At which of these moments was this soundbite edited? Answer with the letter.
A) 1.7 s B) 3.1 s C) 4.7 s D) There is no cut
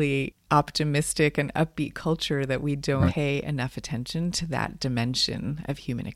B